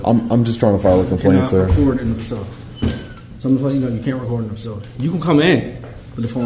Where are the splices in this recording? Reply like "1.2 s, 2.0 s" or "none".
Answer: none